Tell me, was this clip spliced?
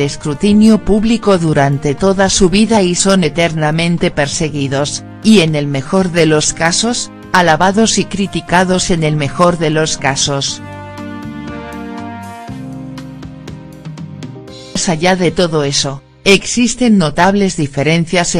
yes; 1 cut; at 14.8 s

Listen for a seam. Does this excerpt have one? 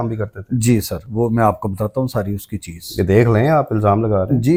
no; 0 cuts

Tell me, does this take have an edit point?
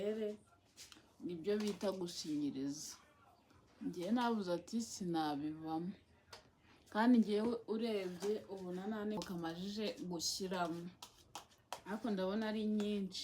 yes; 1 cut; at 9.2 s

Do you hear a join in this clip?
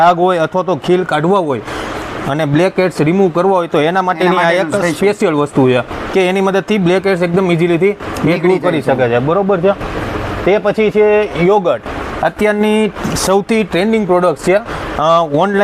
no; 0 cuts

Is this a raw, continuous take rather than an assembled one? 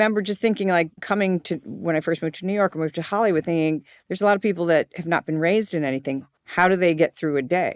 no; 1 cut; at 1.0 s

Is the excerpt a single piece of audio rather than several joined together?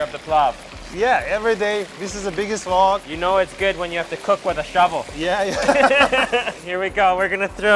no; 2 cuts; at 3.1 s, 6.6 s

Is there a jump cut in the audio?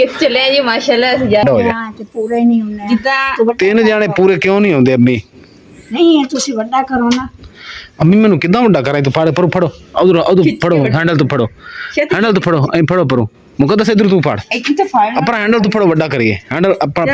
yes; 1 cut; at 1.4 s

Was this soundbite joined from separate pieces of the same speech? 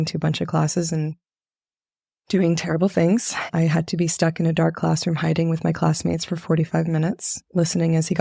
yes; 1 cut; at 3.4 s

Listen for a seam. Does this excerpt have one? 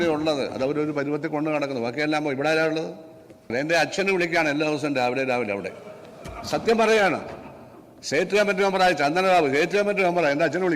yes; 1 cut; at 3.5 s

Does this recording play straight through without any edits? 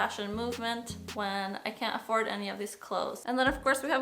no; 2 cuts; at 1.0 s, 3.2 s

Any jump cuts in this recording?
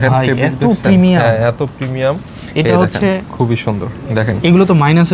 no; 0 cuts

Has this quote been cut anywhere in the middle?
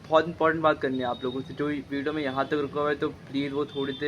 no; 0 cuts

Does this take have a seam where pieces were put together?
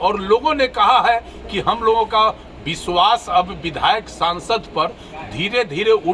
no; 0 cuts

